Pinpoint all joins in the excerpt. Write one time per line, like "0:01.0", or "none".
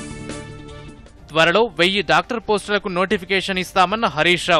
0:01.0